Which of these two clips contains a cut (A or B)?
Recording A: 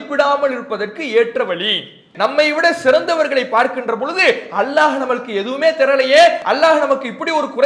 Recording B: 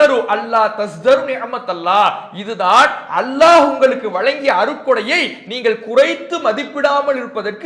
A